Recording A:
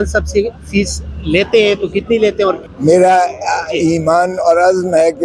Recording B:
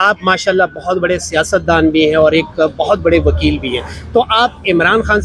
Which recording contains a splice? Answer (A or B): A